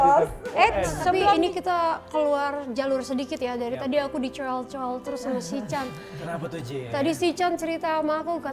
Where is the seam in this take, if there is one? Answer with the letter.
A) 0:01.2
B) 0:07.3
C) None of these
A